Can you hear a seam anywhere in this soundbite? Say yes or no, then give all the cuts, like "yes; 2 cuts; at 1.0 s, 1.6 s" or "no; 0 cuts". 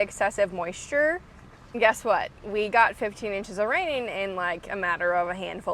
yes; 1 cut; at 1.7 s